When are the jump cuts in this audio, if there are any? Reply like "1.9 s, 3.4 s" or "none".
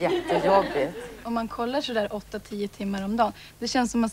1.2 s